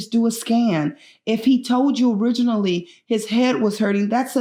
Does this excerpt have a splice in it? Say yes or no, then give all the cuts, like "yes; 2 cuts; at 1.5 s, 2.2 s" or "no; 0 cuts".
no; 0 cuts